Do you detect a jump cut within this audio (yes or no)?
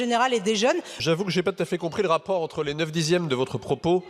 yes